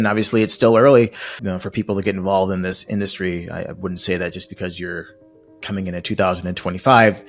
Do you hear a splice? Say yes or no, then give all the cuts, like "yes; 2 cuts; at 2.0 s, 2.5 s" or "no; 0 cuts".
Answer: yes; 1 cut; at 1.3 s